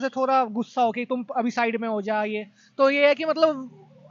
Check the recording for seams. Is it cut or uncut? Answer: uncut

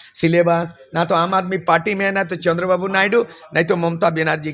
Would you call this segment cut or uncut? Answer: uncut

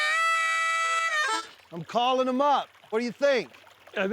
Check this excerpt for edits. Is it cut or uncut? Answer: cut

